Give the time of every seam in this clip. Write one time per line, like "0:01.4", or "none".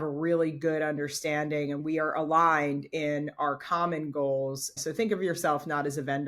0:01.8
0:04.8